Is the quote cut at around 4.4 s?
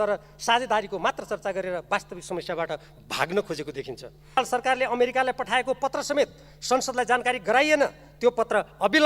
yes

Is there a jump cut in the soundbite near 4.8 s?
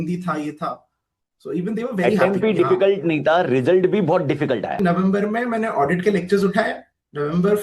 yes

